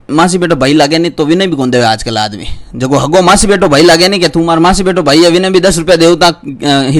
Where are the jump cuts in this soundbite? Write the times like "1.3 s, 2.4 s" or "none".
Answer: none